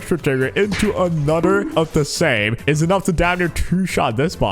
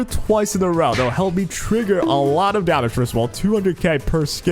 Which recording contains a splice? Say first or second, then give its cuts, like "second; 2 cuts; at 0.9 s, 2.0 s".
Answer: first; 1 cut; at 2.5 s